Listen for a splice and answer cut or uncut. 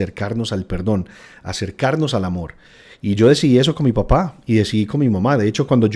uncut